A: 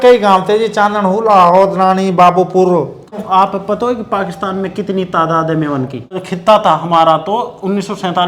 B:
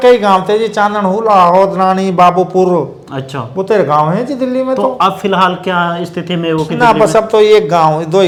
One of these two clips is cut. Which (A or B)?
A